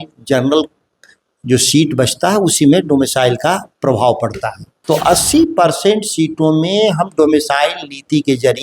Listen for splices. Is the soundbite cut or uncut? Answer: cut